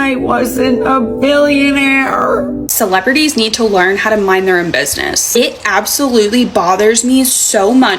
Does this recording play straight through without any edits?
no; 1 cut; at 2.7 s

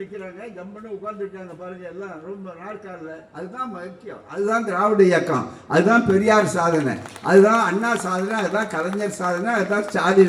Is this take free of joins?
yes; 0 cuts

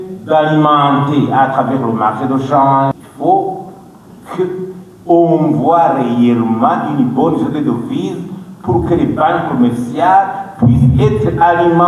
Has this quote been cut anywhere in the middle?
yes; 1 cut; at 2.9 s

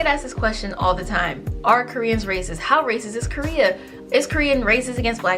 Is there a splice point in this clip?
no; 0 cuts

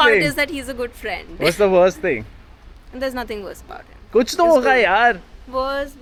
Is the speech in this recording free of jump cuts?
yes; 0 cuts

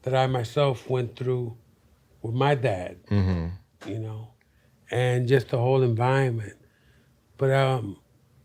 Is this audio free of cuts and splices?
yes; 0 cuts

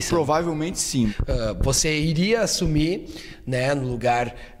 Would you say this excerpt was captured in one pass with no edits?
no; 1 cut; at 1.1 s

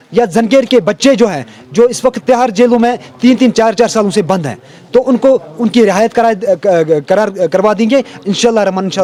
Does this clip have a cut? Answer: no; 0 cuts

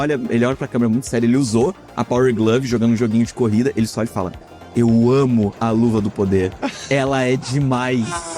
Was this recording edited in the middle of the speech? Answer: no; 0 cuts

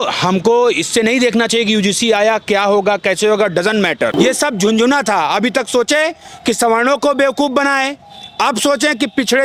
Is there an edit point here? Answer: yes; 1 cut; at 4.1 s

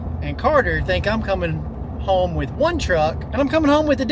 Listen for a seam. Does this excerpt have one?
no; 0 cuts

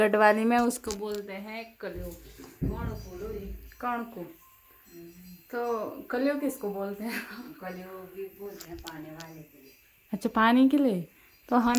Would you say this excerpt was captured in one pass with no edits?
yes; 0 cuts

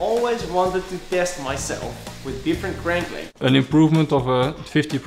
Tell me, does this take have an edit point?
yes; 1 cut; at 3.4 s

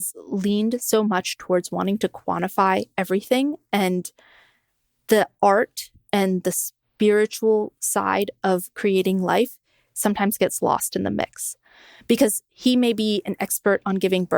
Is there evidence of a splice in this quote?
no; 0 cuts

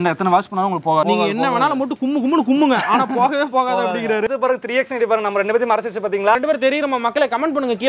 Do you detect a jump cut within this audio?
yes; 3 cuts; at 1.0 s, 4.3 s, 6.4 s

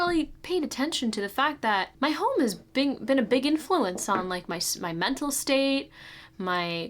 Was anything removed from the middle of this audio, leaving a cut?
yes; 1 cut; at 1.9 s

